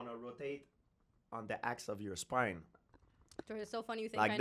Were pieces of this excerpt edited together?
no; 0 cuts

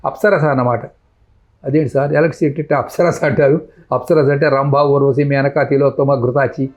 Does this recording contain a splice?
no; 0 cuts

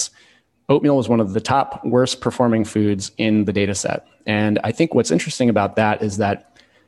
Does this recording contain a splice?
yes; 1 cut; at 1.3 s

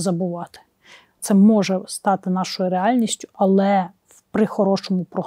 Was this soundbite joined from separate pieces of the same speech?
yes; 1 cut; at 1.2 s

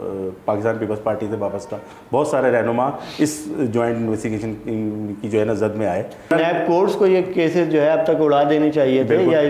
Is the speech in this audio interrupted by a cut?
yes; 1 cut; at 6.3 s

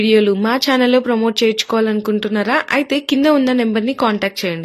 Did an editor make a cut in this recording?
no; 0 cuts

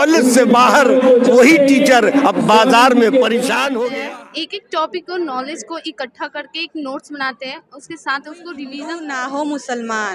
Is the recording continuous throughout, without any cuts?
no; 2 cuts; at 4.0 s, 8.8 s

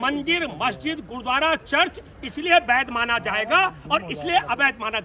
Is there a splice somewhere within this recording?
no; 0 cuts

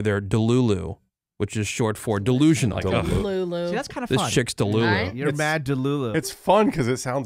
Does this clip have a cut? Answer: yes; 2 cuts; at 2.8 s, 6.1 s

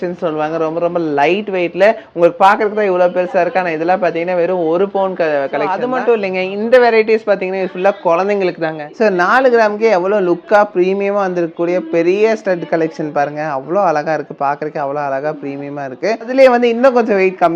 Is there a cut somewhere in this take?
yes; 3 cuts; at 5.8 s, 8.8 s, 16.2 s

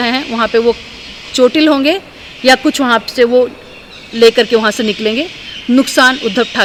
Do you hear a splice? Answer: no; 0 cuts

